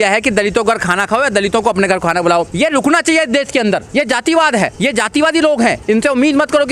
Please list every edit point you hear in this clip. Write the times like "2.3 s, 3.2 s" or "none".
2.5 s, 3.9 s, 4.7 s, 5.8 s